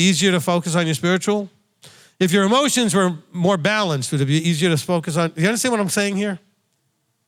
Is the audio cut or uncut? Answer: uncut